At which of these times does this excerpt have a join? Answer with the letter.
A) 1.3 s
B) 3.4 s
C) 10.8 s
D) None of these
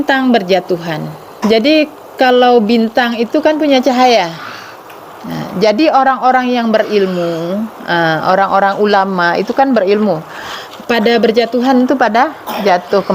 A